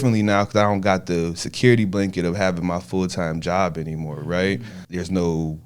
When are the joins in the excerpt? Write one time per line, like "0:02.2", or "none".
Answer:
0:04.8